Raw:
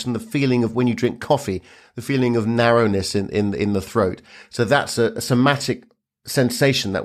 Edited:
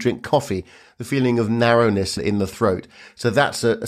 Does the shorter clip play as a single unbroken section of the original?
no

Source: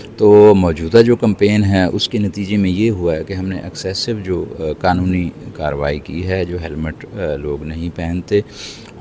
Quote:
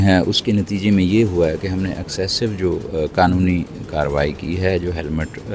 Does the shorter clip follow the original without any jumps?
yes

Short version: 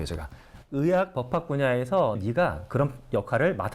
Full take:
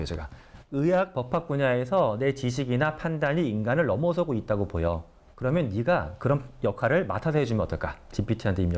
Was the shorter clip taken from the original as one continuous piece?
no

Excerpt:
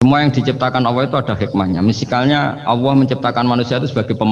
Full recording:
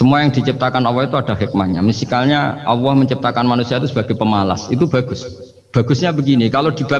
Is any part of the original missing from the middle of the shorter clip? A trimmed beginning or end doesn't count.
no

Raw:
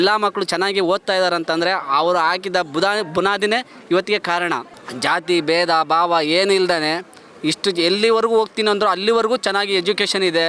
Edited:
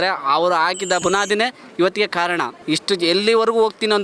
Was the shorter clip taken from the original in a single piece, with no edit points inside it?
no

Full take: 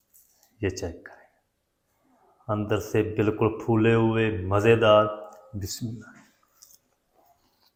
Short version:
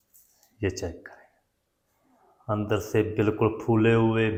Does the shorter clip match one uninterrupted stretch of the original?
yes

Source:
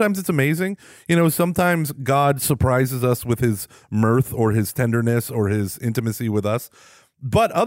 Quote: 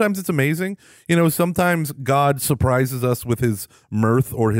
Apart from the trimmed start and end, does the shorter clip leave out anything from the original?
no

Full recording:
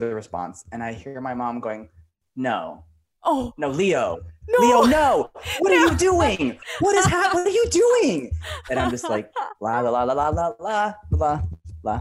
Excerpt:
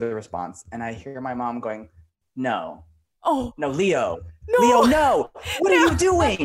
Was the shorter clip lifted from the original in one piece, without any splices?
yes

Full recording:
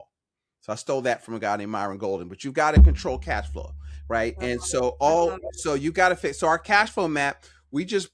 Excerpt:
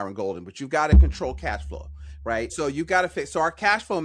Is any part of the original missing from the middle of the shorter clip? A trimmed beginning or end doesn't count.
yes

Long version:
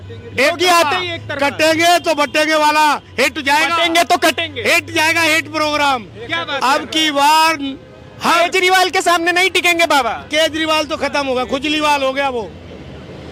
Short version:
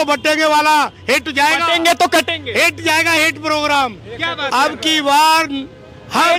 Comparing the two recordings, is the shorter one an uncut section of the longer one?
yes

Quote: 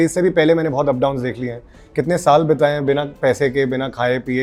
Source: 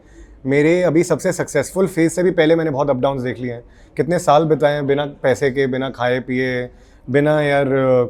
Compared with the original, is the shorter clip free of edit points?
yes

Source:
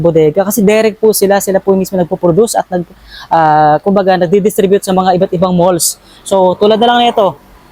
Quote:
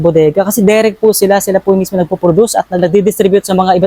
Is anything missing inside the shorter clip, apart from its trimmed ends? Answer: yes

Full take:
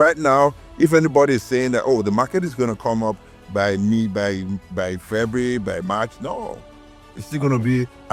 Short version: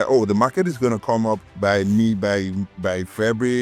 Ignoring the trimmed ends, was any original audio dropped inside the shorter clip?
yes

